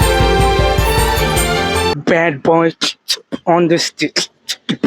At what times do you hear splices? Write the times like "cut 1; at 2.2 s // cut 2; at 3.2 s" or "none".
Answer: cut 1; at 1.9 s